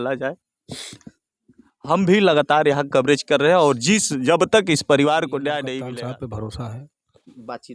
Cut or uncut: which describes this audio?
cut